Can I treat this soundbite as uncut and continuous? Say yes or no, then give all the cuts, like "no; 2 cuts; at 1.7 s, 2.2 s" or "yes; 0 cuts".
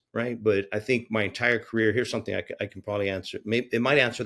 yes; 0 cuts